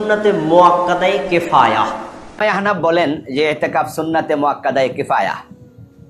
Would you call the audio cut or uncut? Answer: cut